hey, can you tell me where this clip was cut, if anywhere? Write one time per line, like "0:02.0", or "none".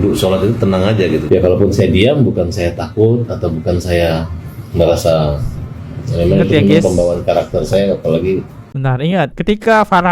0:01.2